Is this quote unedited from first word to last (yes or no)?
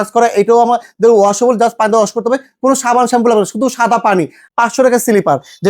no